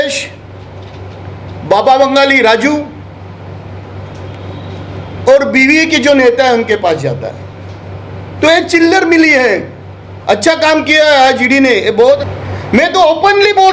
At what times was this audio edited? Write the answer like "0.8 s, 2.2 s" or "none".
12.2 s